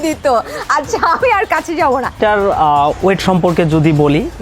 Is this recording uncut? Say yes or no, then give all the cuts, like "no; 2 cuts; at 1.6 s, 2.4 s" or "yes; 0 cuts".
no; 1 cut; at 2.2 s